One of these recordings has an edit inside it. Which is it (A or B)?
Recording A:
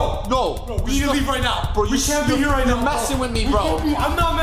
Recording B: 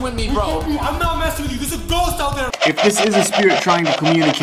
B